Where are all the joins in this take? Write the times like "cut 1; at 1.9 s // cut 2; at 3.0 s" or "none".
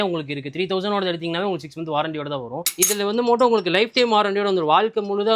cut 1; at 2.6 s